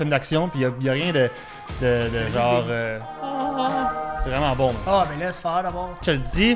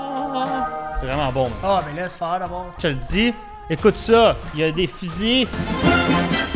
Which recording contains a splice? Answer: second; 1 cut; at 4.5 s

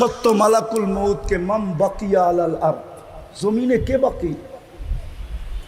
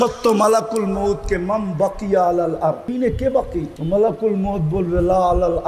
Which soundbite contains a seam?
second; 2 cuts; at 2.9 s, 3.8 s

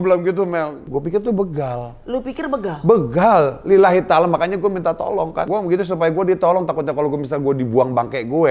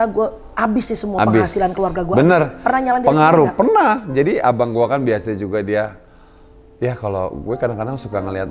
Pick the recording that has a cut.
first; 2 cuts; at 0.9 s, 5.4 s

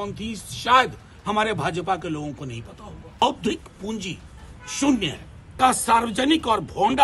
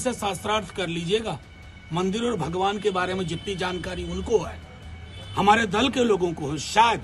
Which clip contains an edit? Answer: first; 2 cuts; at 3.2 s, 5.5 s

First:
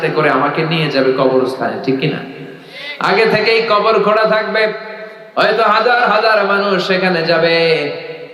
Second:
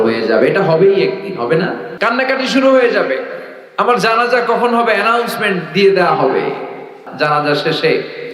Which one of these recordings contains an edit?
second; 2 cuts; at 1.9 s, 7.0 s

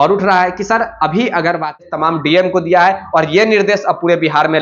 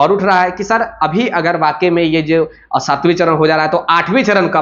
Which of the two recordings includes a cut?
first; 1 cut; at 1.8 s

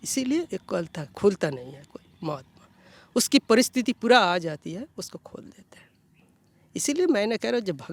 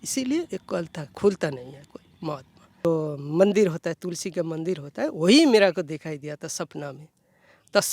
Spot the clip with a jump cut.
second; 1 cut; at 2.8 s

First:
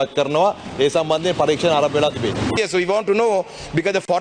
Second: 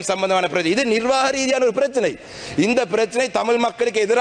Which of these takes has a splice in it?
first; 1 cut; at 2.5 s

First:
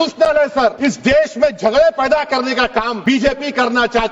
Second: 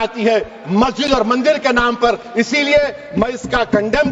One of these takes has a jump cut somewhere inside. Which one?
first; 2 cuts; at 0.8 s, 2.9 s

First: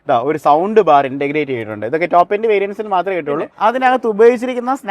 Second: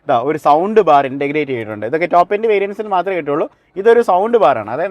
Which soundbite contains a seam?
first; 1 cut; at 3.5 s

